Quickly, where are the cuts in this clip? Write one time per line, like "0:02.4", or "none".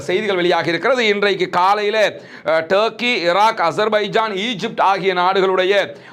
none